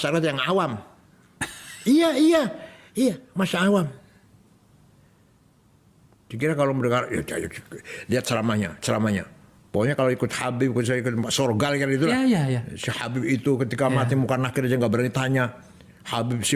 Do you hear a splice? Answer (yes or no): no